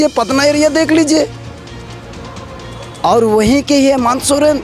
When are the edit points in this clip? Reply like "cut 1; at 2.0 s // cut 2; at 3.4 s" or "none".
none